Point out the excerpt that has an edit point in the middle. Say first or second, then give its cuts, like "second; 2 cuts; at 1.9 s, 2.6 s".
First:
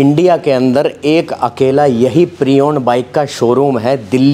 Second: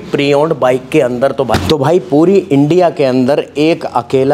second; 1 cut; at 1.5 s